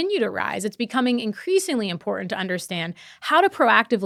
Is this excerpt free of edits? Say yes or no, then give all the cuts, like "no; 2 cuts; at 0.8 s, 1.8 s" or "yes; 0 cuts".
yes; 0 cuts